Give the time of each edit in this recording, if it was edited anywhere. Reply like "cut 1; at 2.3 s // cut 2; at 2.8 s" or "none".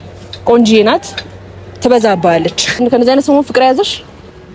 cut 1; at 2.8 s